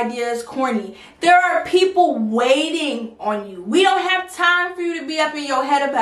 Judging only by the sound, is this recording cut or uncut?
uncut